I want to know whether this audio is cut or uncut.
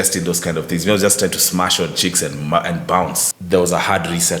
cut